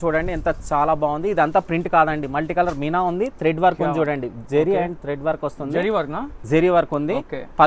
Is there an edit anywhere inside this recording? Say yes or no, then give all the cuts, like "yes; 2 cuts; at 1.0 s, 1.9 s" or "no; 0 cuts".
no; 0 cuts